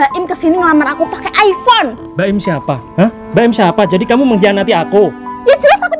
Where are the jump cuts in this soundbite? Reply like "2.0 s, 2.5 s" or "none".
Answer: none